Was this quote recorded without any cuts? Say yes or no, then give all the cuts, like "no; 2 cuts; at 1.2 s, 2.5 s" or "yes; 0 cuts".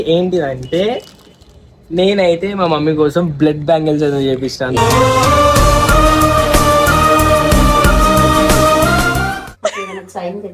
no; 1 cut; at 9.3 s